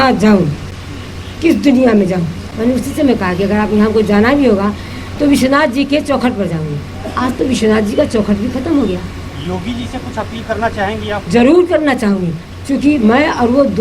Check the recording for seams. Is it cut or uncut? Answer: cut